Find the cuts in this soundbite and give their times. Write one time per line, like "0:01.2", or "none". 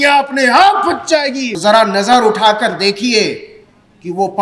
0:01.5